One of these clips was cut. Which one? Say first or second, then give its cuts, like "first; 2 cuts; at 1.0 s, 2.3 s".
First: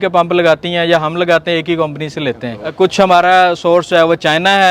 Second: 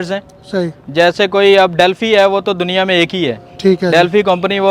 first; 1 cut; at 2.7 s